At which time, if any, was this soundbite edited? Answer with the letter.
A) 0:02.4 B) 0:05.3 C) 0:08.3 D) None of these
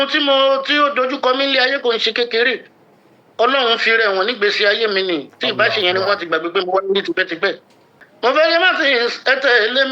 C